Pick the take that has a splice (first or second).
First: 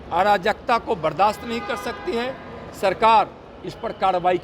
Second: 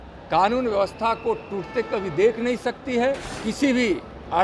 second